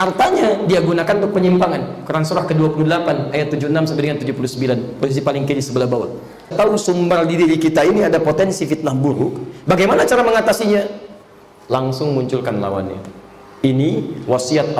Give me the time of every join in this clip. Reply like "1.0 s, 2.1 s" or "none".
6.5 s